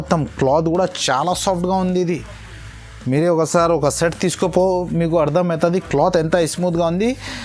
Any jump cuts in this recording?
no; 0 cuts

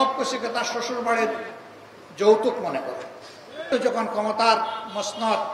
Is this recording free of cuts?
no; 1 cut; at 3.7 s

